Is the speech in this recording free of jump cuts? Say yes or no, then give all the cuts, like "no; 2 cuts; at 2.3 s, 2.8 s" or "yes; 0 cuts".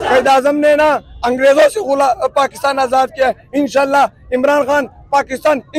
yes; 0 cuts